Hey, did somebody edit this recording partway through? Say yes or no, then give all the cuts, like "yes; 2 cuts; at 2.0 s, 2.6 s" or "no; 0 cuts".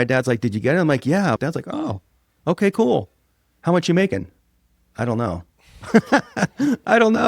yes; 1 cut; at 1.4 s